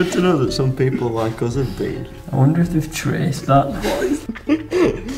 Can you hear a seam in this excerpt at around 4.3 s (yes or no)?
yes